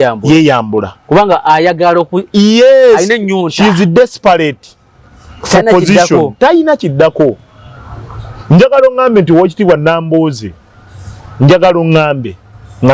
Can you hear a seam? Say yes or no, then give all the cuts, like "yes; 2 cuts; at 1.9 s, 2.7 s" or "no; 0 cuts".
no; 0 cuts